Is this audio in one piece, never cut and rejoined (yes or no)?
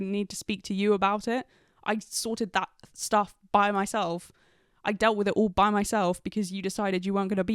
yes